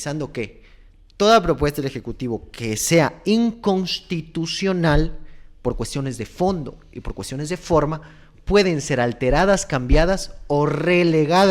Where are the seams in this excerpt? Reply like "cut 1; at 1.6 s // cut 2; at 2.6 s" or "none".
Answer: none